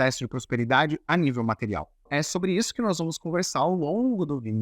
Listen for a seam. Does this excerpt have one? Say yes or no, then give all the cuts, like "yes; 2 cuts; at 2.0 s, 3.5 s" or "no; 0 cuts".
yes; 1 cut; at 2.1 s